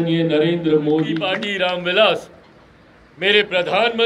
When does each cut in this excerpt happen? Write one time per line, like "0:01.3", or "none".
0:01.2